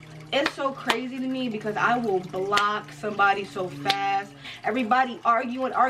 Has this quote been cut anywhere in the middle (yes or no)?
yes